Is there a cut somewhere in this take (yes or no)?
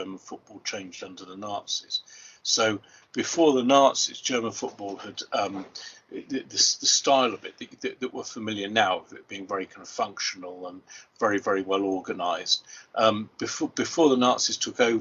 no